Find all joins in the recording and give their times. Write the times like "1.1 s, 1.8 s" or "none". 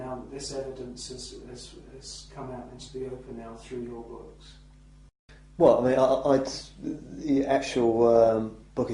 none